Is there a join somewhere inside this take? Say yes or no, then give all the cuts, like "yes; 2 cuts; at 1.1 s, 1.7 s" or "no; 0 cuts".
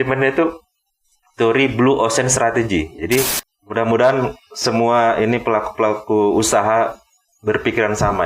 yes; 1 cut; at 3.4 s